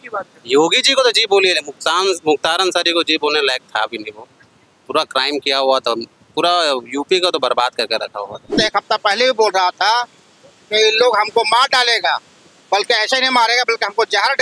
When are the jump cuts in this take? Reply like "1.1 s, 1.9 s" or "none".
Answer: 8.6 s